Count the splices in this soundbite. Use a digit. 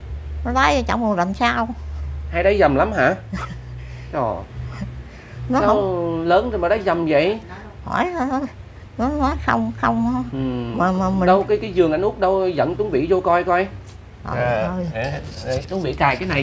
0